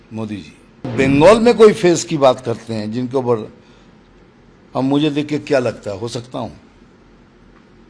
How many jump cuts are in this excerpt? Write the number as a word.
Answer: one